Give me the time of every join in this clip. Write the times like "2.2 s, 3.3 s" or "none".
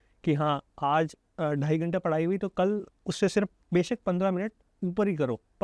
none